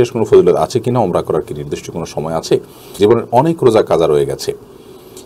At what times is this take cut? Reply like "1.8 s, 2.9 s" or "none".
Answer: 2.8 s